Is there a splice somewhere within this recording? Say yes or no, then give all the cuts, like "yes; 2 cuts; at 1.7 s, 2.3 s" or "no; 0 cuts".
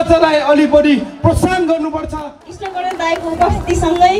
yes; 1 cut; at 2.4 s